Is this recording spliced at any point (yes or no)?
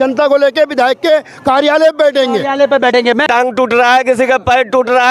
yes